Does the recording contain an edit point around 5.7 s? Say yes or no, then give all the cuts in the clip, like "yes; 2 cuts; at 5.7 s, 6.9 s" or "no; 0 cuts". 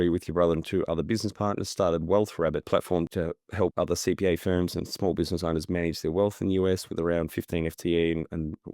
no; 1 cut; at 3.2 s